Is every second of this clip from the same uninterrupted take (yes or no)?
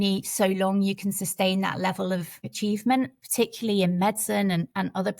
no